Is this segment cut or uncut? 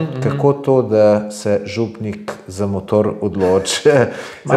uncut